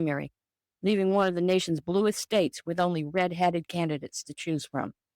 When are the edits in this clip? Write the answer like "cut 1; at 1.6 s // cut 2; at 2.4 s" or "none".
cut 1; at 3.7 s